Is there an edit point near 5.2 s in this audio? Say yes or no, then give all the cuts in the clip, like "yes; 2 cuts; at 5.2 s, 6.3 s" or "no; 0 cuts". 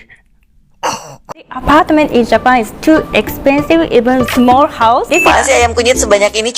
yes; 2 cuts; at 1.6 s, 5.2 s